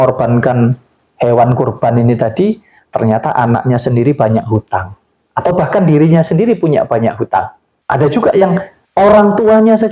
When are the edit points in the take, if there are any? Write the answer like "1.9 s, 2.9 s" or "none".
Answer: none